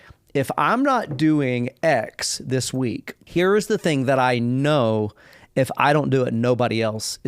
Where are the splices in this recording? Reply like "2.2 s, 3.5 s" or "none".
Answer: 3.1 s